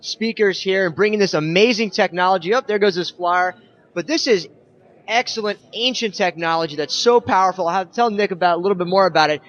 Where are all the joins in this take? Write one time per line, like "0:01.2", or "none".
0:02.1